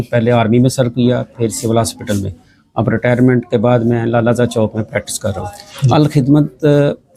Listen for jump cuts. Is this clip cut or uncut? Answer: uncut